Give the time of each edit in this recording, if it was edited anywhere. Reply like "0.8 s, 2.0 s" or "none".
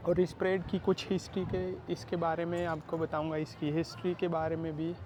none